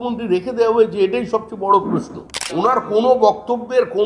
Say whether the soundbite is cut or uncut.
cut